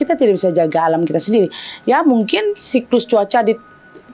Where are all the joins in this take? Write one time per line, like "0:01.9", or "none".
none